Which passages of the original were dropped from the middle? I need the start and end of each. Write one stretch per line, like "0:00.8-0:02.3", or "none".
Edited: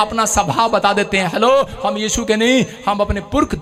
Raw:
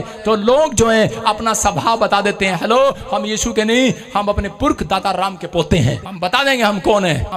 none